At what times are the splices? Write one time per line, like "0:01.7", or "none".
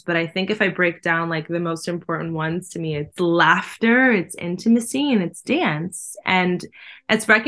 0:03.1